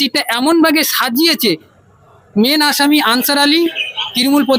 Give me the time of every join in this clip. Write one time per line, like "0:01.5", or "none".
none